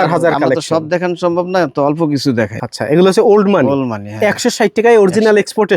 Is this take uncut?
no; 1 cut; at 2.6 s

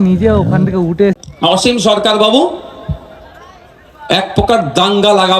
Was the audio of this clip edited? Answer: yes; 1 cut; at 1.1 s

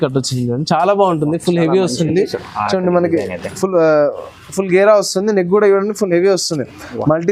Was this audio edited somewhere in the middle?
no; 0 cuts

